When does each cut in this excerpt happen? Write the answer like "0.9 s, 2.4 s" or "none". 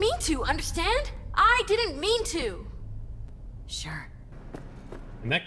4.3 s